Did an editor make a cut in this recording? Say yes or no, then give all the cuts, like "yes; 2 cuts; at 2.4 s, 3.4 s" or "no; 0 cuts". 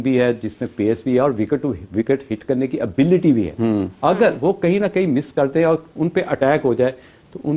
no; 0 cuts